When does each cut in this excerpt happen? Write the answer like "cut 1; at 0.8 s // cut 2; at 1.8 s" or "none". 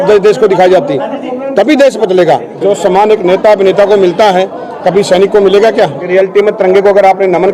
cut 1; at 2.5 s // cut 2; at 6.0 s